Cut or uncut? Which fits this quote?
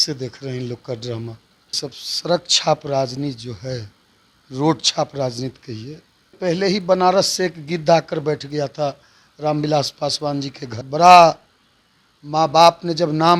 cut